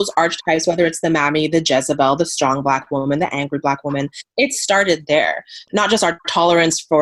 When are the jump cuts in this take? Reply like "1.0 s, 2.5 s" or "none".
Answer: none